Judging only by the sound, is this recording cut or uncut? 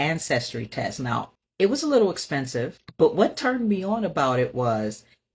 cut